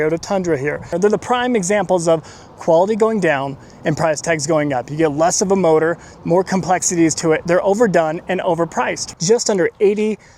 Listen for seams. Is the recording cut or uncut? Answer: cut